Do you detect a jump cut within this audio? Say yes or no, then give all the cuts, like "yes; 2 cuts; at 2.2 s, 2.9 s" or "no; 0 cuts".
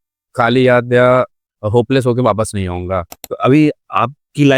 yes; 1 cut; at 3.2 s